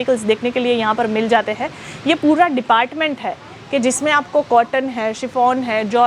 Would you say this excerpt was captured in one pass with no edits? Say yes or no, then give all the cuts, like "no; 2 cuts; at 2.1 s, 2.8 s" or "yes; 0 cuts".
yes; 0 cuts